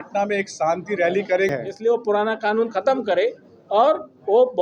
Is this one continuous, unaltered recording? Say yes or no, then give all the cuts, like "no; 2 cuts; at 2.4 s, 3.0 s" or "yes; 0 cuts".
no; 1 cut; at 1.5 s